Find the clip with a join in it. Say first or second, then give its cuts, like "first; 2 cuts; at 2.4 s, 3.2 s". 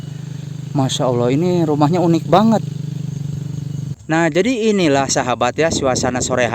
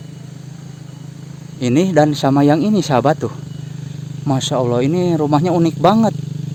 first; 1 cut; at 4.0 s